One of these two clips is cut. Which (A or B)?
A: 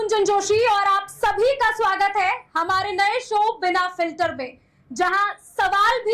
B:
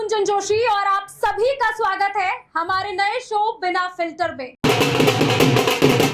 B